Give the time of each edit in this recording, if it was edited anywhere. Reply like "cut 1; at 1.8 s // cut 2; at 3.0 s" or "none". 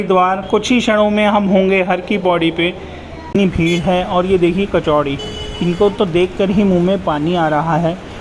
cut 1; at 3.4 s